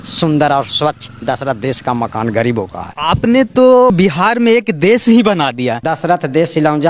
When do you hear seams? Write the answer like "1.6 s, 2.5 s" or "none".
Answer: 2.8 s, 5.9 s